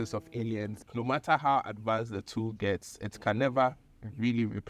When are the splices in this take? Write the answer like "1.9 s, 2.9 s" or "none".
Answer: 0.9 s